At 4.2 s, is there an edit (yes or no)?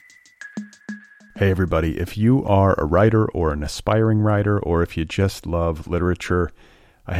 no